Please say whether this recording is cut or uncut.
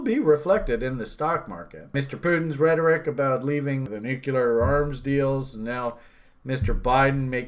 cut